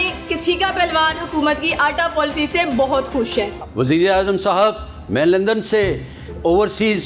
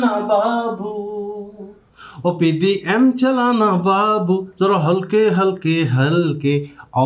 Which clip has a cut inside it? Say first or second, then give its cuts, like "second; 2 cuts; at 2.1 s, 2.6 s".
first; 1 cut; at 3.5 s